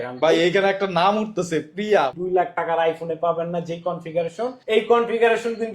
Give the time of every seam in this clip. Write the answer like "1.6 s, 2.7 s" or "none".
2.1 s, 4.6 s